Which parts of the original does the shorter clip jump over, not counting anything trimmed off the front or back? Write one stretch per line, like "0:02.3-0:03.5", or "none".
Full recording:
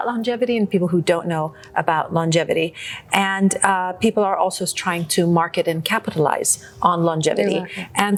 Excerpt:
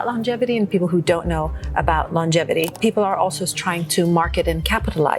0:02.7-0:03.9

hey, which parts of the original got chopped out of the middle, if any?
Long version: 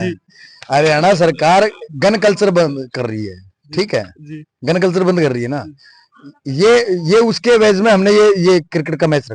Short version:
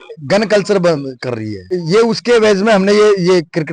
0:03.5-0:06.9

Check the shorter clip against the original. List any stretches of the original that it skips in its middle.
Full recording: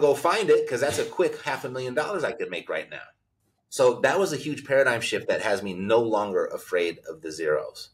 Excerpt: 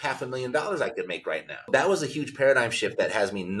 0:03.1-0:04.0

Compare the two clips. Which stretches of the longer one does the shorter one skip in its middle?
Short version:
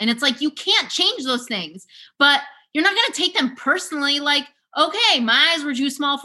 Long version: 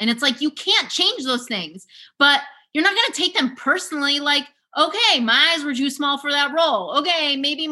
none

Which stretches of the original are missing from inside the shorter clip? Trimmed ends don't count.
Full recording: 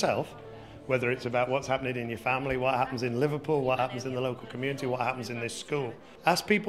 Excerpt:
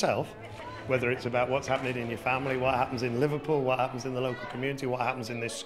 none

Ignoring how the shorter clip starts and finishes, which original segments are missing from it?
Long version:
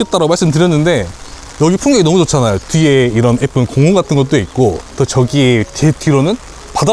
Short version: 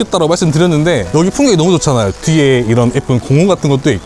0:01.1-0:01.5

